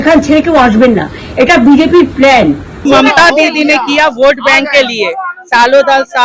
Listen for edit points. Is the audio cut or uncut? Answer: cut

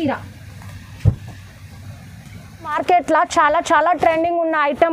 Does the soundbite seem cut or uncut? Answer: cut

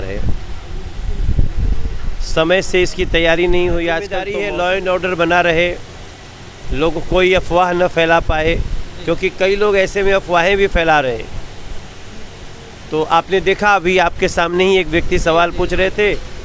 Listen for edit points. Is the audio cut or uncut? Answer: cut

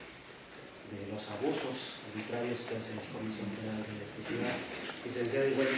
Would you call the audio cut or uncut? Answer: uncut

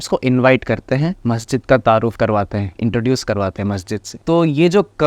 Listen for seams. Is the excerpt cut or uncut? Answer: cut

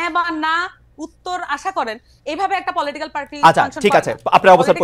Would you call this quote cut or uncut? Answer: uncut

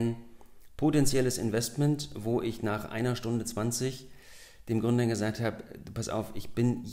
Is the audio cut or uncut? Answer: uncut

